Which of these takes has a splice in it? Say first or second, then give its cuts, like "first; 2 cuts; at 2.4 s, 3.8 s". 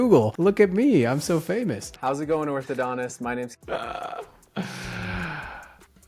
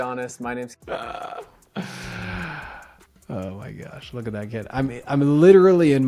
first; 1 cut; at 1.8 s